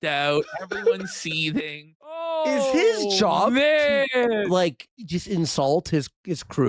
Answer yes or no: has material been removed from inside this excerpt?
yes